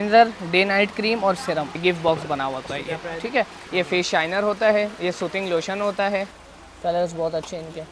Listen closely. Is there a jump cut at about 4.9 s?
no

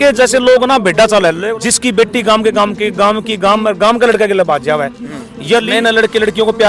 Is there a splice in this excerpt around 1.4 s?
yes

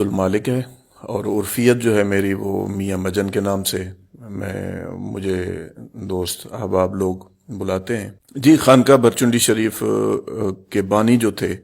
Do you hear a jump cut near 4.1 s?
no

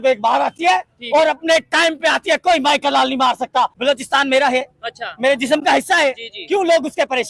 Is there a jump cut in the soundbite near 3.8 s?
yes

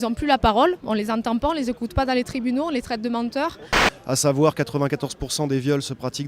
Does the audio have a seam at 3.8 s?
yes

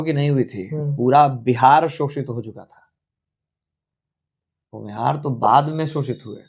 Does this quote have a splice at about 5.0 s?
no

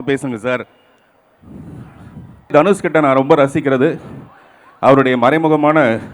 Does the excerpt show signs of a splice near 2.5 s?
yes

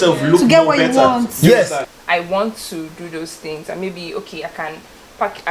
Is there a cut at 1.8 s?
yes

